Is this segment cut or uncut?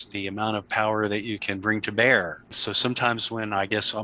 cut